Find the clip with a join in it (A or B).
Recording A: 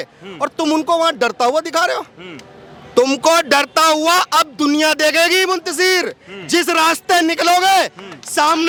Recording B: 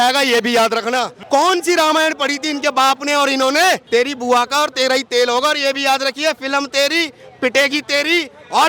B